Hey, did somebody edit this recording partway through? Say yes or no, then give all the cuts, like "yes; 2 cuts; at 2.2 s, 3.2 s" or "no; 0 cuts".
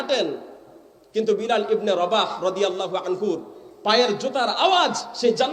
no; 0 cuts